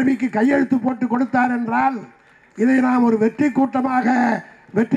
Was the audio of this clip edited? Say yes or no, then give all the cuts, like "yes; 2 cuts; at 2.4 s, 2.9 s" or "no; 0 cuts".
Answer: no; 0 cuts